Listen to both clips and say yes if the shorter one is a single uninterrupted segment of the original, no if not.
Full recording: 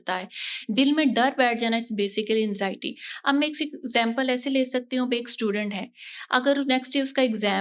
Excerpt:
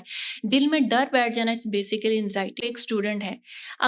no